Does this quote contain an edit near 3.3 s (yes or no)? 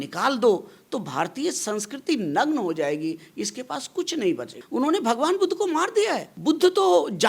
no